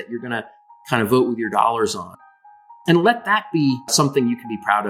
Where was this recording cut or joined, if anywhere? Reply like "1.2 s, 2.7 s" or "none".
2.4 s, 3.9 s